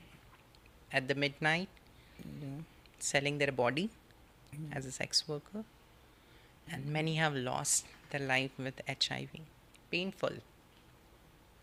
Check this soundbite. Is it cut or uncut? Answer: uncut